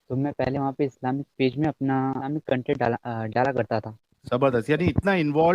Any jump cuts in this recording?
yes; 1 cut; at 2.3 s

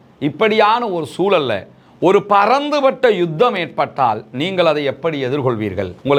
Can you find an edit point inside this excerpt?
no; 0 cuts

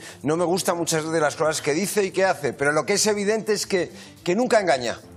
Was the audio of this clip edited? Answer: no; 0 cuts

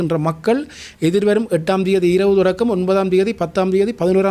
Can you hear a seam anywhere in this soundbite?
no; 0 cuts

